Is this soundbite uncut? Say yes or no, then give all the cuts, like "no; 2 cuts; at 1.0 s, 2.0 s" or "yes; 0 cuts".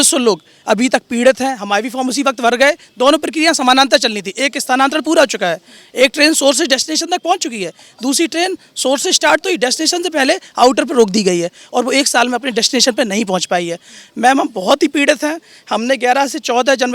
yes; 0 cuts